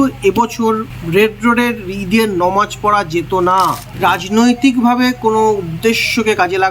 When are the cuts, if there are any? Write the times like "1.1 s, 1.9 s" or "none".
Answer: 3.9 s